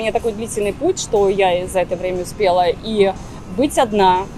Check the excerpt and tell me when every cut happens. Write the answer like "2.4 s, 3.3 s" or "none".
none